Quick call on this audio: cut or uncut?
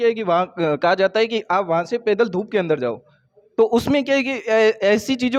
uncut